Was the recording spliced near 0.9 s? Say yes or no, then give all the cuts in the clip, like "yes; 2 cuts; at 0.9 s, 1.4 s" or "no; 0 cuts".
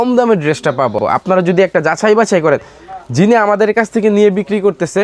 no; 0 cuts